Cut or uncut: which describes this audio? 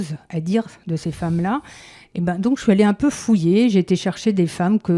uncut